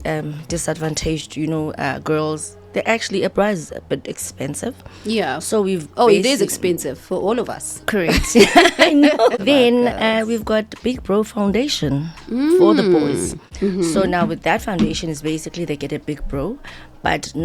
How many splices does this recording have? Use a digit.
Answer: 2